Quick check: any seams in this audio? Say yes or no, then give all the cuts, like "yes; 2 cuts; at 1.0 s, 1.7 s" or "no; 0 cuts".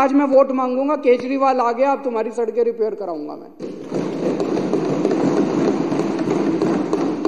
no; 0 cuts